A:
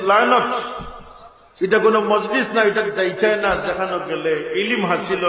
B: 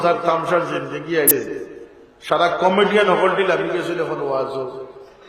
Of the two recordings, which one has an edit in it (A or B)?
B